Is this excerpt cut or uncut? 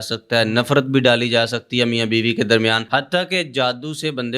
cut